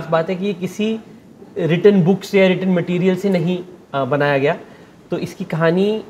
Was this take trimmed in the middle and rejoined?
no; 0 cuts

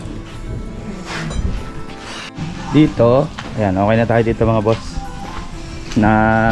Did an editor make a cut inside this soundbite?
yes; 1 cut; at 2.3 s

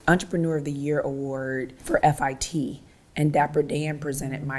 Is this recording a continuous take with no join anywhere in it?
no; 1 cut; at 1.8 s

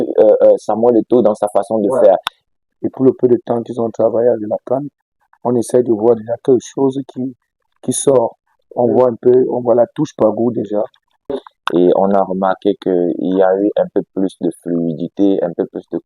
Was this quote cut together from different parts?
yes; 2 cuts; at 2.4 s, 11.3 s

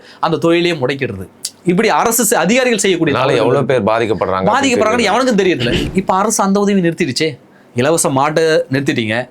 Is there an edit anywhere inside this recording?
yes; 1 cut; at 5.7 s

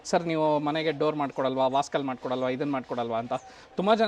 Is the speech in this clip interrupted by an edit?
no; 0 cuts

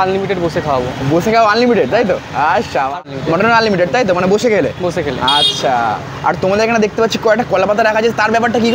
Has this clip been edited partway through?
yes; 1 cut; at 3.0 s

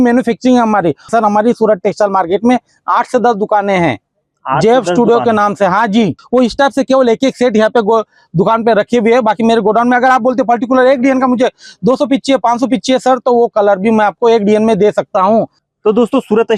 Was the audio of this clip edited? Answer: yes; 3 cuts; at 1.0 s, 6.2 s, 15.6 s

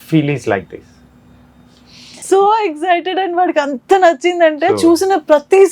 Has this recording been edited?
yes; 1 cut; at 2.2 s

